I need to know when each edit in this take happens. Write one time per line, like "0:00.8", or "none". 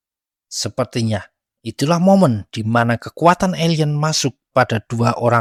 none